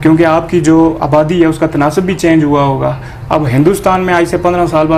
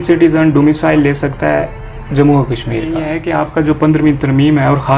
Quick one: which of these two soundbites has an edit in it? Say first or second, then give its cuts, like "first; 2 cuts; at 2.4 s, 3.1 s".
second; 1 cut; at 3.1 s